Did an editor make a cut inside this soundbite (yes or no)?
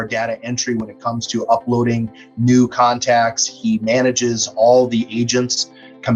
no